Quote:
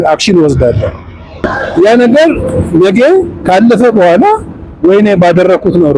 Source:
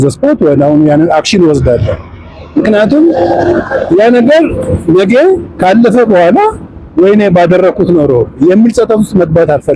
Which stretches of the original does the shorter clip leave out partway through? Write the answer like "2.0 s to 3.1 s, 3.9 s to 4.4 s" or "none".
2.5 s to 3.6 s